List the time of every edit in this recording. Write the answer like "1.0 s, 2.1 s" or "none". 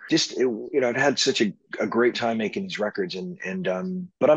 none

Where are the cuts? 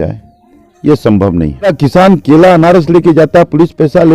1.7 s

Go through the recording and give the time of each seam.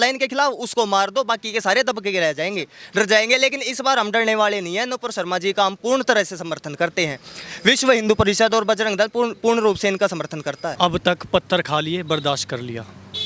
10.7 s

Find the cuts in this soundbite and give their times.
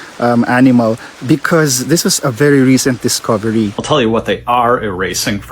3.8 s

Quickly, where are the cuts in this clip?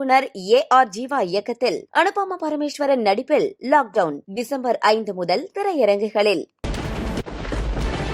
6.6 s

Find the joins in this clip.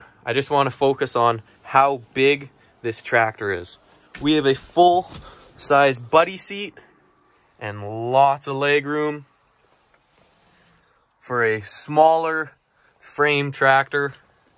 none

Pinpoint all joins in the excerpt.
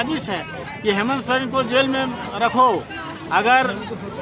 none

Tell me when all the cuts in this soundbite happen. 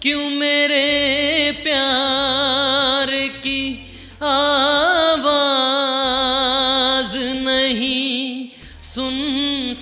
none

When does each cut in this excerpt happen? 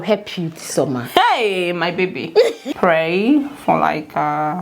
2.6 s

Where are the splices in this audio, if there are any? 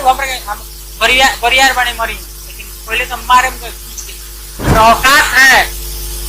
4.8 s

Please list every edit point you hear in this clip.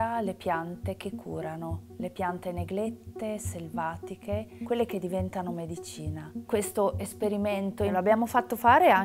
6.3 s, 7.9 s

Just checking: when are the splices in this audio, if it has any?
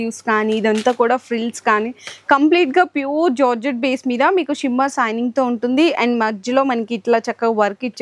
none

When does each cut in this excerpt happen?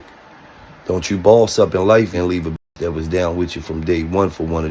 2.1 s

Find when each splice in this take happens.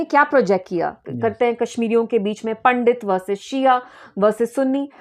1.0 s

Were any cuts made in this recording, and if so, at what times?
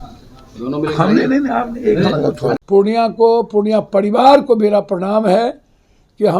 2.6 s

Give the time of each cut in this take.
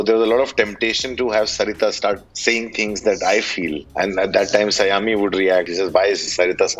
2.3 s, 3.8 s, 5.7 s

